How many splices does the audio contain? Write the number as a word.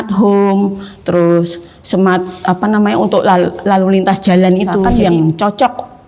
one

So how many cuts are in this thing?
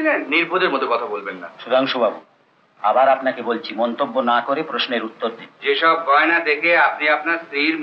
one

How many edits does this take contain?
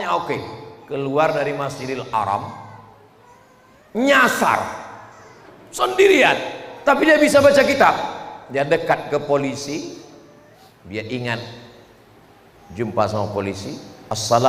zero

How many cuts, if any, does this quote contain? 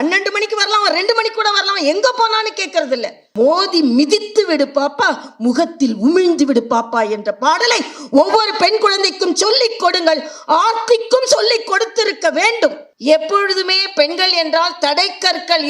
two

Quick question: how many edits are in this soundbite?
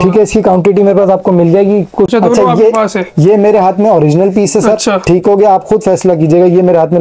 one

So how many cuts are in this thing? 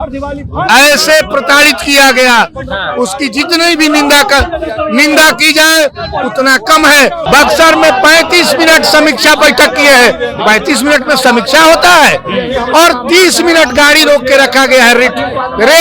one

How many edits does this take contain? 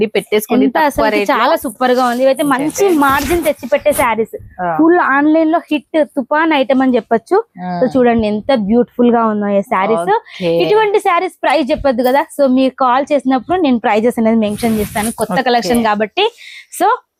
zero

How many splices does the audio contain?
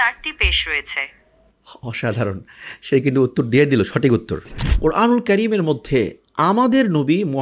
one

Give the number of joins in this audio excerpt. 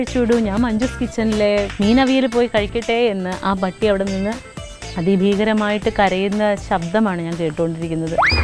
one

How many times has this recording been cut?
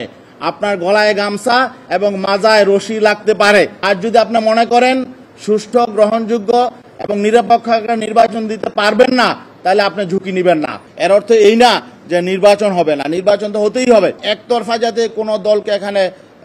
three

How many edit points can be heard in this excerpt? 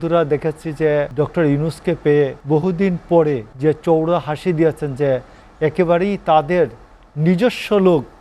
three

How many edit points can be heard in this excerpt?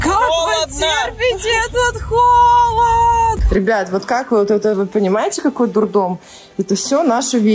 one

